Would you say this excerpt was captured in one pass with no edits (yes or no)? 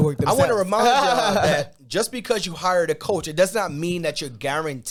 yes